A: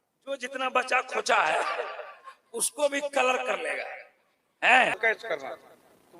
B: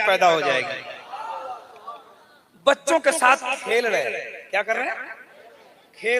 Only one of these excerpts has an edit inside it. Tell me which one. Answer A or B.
A